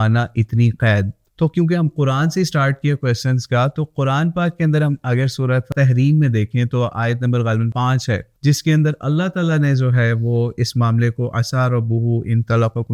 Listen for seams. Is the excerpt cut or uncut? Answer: uncut